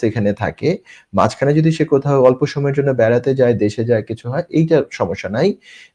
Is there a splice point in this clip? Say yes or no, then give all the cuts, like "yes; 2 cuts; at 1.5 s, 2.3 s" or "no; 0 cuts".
no; 0 cuts